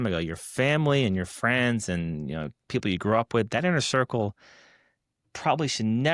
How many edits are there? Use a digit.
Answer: 0